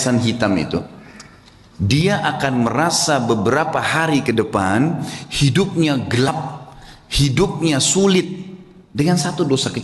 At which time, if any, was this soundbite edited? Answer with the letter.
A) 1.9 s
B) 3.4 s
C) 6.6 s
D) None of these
D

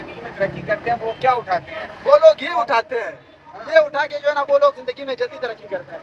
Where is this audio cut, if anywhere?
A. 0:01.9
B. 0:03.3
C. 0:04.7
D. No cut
D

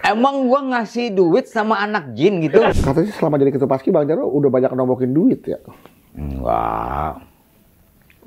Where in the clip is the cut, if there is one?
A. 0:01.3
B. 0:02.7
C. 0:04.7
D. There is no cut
B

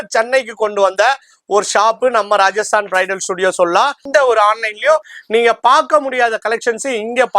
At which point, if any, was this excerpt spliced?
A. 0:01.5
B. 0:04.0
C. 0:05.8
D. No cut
B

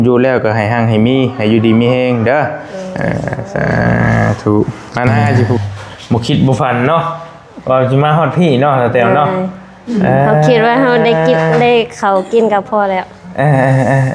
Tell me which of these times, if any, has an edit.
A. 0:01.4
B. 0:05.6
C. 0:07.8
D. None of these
B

